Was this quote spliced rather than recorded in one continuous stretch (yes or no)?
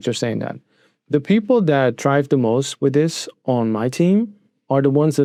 no